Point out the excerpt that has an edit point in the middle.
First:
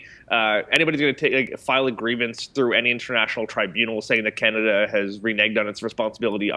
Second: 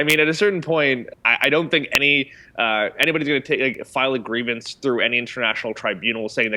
second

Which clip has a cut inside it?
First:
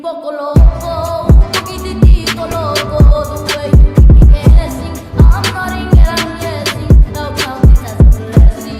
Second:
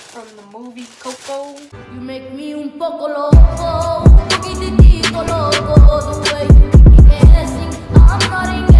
second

